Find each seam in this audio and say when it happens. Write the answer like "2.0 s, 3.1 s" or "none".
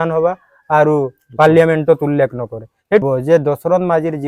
3.0 s